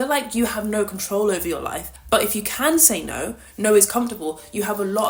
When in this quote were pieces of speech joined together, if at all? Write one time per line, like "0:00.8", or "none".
none